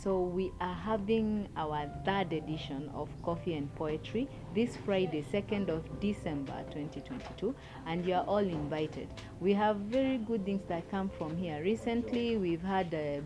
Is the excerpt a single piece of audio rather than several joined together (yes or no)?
yes